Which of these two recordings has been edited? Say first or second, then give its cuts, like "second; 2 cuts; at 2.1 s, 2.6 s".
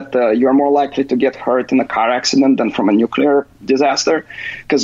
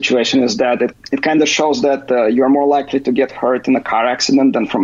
second; 1 cut; at 0.9 s